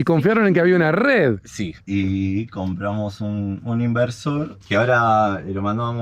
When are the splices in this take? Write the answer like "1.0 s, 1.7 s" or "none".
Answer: 1.7 s, 4.5 s

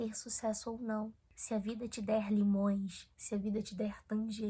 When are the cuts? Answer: 1.2 s

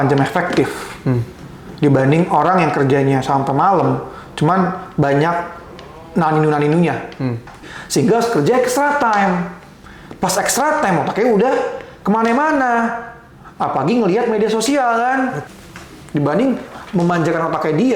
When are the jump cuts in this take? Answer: 7.6 s, 15.4 s

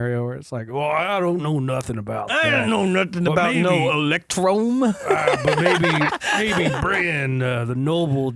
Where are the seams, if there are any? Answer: none

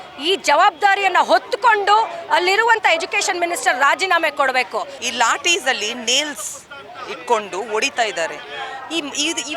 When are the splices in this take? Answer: 5.0 s

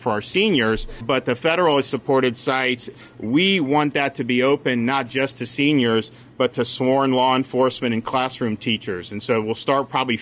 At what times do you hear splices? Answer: 1.0 s, 3.0 s

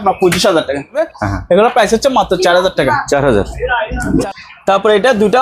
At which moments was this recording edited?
1.0 s, 4.2 s

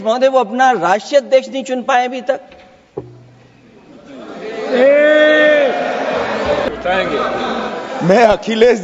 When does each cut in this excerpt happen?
6.7 s

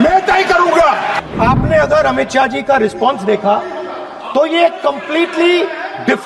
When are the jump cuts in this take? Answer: 1.2 s

